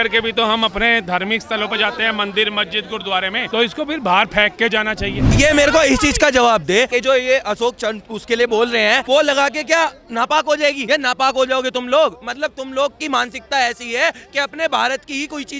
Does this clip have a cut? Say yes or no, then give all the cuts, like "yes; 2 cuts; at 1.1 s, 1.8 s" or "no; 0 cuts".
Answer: yes; 5 cuts; at 3.4 s, 5.3 s, 6.9 s, 9.0 s, 10.8 s